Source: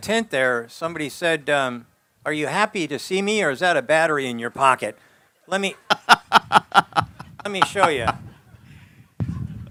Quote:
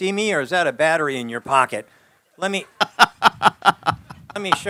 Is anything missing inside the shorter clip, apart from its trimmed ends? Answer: no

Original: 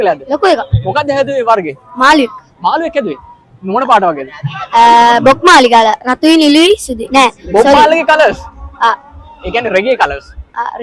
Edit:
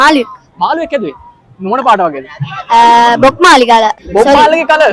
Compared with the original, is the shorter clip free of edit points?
no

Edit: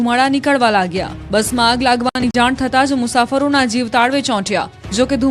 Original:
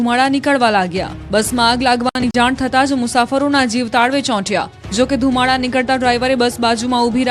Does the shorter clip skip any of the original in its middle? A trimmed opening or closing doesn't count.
no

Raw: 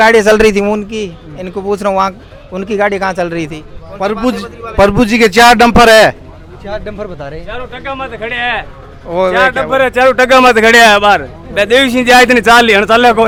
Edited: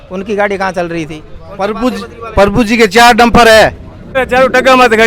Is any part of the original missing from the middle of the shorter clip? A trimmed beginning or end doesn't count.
yes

